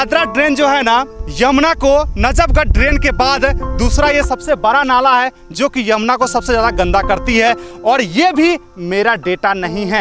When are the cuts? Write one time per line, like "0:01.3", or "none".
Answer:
0:01.2

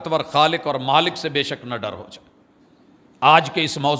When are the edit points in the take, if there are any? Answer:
none

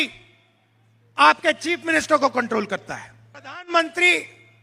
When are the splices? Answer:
0:03.7

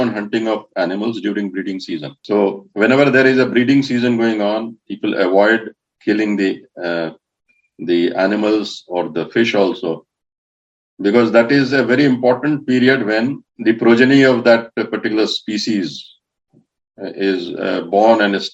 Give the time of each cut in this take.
0:02.1
0:13.5

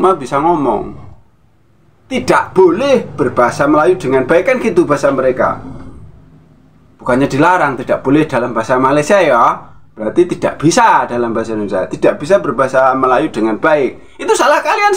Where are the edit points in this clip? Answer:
none

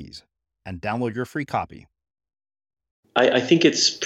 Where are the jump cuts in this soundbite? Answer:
0:03.1

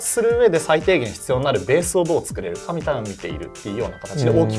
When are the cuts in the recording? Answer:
none

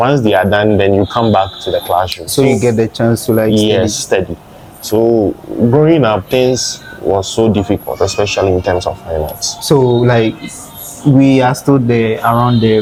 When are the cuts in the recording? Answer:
none

